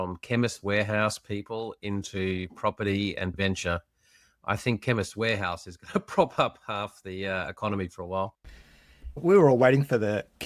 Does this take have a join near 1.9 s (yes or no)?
no